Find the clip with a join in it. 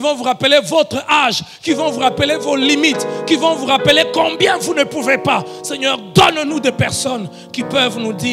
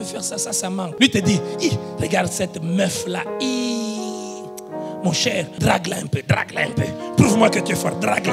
second; 2 cuts; at 0.9 s, 5.5 s

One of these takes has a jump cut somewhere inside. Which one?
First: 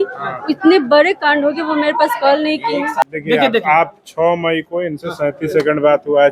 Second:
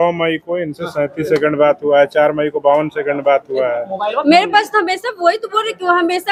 first; 1 cut; at 3.1 s

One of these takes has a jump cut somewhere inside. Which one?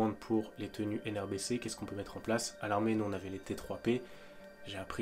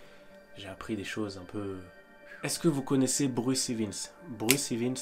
second; 1 cut; at 2.3 s

